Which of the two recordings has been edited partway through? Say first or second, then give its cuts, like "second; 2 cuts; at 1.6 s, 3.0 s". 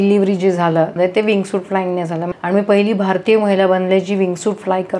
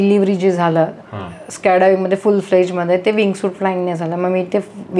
first; 2 cuts; at 0.9 s, 2.2 s